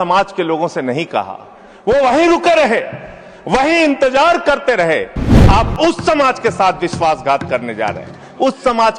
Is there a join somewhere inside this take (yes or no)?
yes